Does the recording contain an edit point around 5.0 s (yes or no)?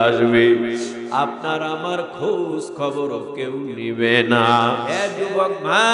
yes